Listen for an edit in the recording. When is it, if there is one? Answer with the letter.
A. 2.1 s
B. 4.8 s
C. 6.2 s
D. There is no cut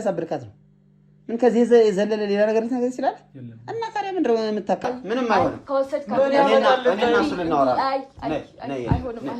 B